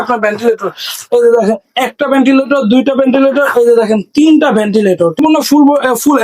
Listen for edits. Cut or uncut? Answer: cut